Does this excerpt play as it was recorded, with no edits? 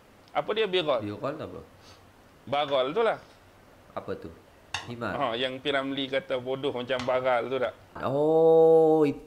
no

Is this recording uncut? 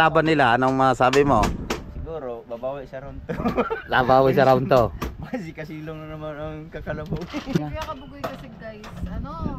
no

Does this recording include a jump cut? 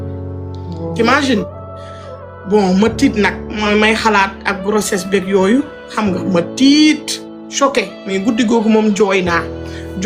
no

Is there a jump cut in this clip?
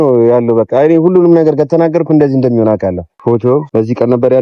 yes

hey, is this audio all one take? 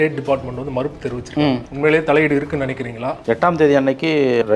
no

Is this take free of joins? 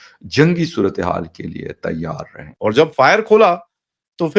no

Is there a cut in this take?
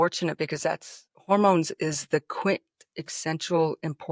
no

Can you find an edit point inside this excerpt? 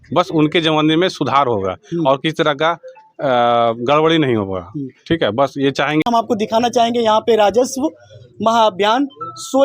yes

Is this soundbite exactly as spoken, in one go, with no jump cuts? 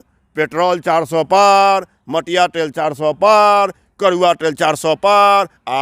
yes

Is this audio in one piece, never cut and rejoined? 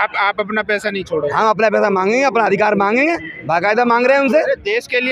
yes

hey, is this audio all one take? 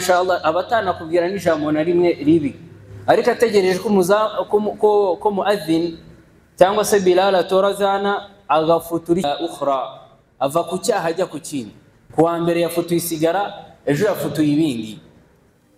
no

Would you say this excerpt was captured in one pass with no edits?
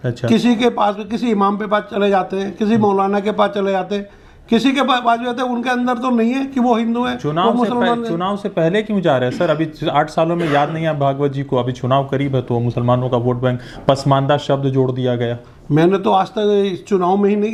yes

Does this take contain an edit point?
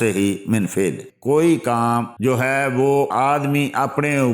yes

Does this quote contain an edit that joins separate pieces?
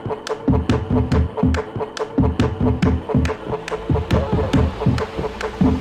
yes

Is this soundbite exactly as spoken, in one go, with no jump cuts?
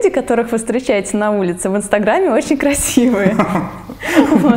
yes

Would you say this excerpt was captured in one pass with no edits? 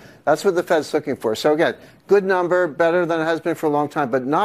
no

